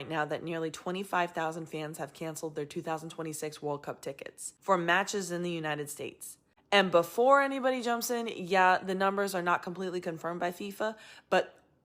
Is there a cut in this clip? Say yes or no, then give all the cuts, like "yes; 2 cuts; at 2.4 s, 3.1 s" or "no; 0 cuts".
no; 0 cuts